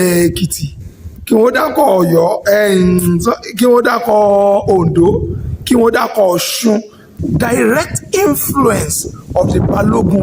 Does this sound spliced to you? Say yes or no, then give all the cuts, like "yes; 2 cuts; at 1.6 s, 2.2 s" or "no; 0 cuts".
yes; 1 cut; at 7.1 s